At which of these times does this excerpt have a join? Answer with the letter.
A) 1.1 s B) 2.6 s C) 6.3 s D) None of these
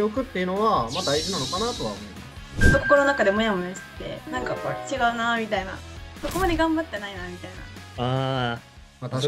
B